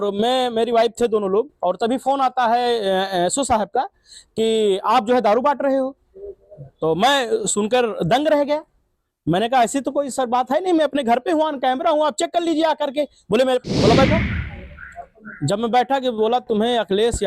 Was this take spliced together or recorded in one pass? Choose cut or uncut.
cut